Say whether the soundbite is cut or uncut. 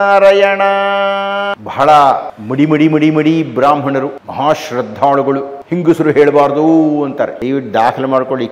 cut